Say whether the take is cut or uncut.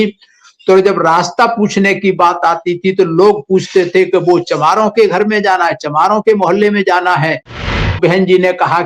cut